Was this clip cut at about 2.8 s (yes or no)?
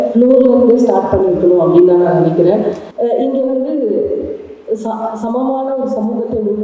yes